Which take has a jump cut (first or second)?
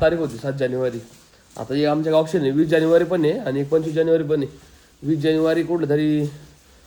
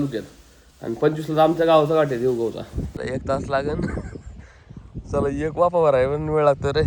second